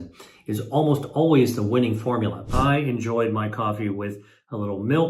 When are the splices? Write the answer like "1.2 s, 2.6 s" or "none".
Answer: 2.4 s